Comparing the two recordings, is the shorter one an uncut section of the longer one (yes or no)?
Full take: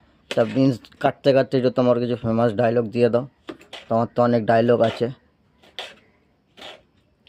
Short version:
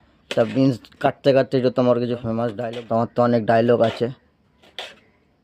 no